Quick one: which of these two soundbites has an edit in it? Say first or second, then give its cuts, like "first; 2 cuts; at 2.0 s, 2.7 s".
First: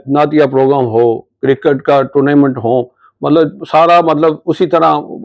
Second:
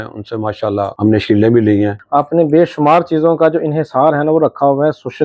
second; 2 cuts; at 0.9 s, 2.0 s